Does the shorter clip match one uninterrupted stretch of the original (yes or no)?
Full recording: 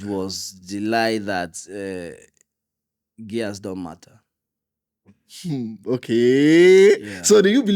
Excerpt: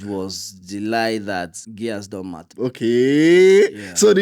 no